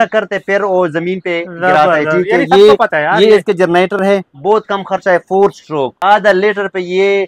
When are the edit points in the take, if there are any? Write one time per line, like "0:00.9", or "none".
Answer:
0:05.9